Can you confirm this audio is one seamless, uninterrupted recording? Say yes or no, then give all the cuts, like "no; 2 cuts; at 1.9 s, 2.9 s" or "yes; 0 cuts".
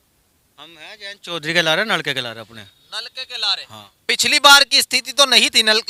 yes; 0 cuts